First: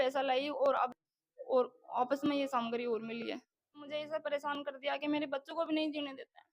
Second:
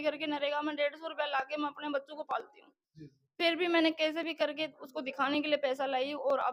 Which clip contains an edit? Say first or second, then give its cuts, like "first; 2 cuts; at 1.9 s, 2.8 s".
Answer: first; 1 cut; at 4.1 s